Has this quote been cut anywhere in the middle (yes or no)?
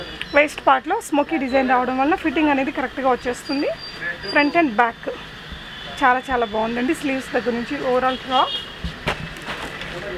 no